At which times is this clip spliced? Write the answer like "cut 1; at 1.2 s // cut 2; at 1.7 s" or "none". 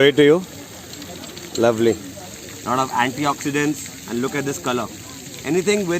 cut 1; at 2.2 s